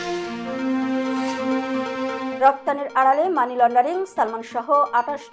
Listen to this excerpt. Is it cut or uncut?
uncut